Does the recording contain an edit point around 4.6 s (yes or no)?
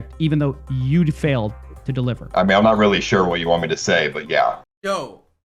yes